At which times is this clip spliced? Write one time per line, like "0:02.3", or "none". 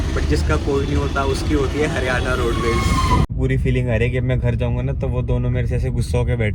0:03.3